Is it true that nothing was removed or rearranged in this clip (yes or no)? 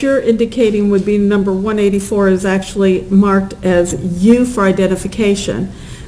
yes